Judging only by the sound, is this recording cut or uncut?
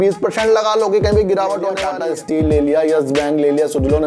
cut